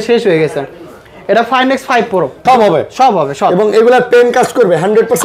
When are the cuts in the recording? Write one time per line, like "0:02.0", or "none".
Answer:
0:02.4